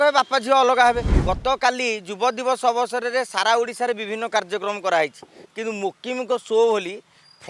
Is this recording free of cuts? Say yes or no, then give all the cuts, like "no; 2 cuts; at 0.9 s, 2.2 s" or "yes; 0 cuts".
no; 1 cut; at 1.1 s